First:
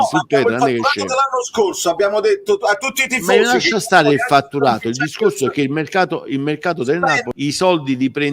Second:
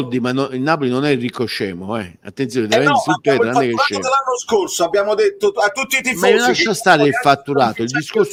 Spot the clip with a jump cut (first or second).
first